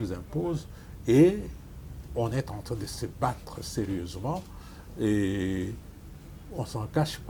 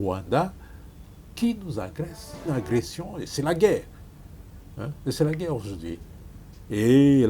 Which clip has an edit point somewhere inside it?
second; 1 cut; at 2.5 s

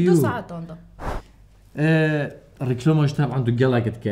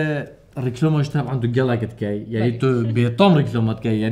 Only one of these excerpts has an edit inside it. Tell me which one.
first; 1 cut; at 0.9 s

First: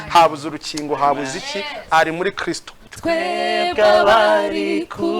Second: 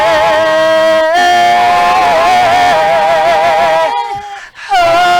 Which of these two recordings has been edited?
first; 1 cut; at 2.7 s

